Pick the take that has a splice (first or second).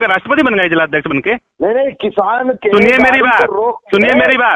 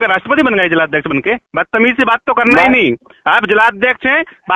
second